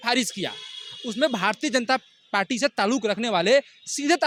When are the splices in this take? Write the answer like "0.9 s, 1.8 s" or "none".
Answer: none